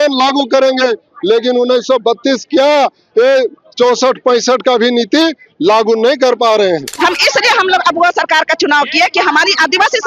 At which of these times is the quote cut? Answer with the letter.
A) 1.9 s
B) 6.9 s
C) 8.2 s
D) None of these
B